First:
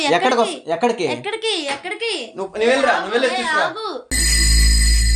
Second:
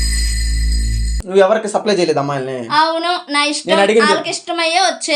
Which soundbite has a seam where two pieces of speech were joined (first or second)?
second